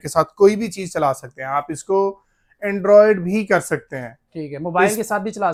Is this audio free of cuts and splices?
yes; 0 cuts

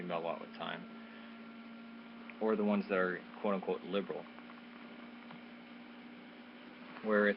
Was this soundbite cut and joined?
no; 0 cuts

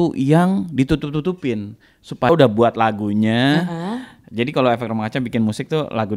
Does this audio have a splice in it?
yes; 1 cut; at 2.3 s

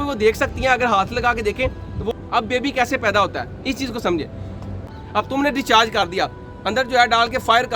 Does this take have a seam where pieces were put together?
yes; 2 cuts; at 2.1 s, 4.9 s

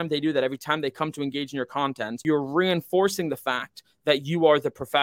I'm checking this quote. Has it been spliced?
yes; 1 cut; at 2.2 s

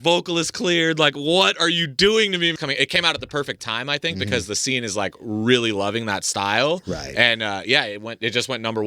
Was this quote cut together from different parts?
yes; 1 cut; at 2.5 s

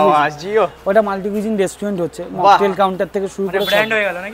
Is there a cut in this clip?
no; 0 cuts

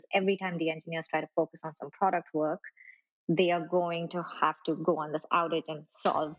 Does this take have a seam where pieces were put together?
no; 0 cuts

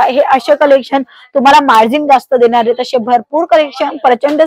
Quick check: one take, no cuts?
yes; 0 cuts

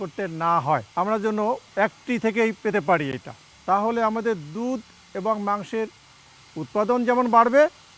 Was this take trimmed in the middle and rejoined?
no; 0 cuts

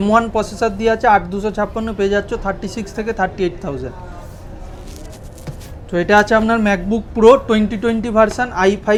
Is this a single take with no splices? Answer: yes; 0 cuts

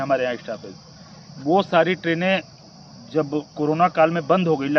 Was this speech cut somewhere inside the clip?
no; 0 cuts

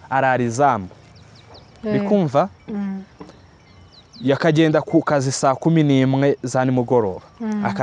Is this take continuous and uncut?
yes; 0 cuts

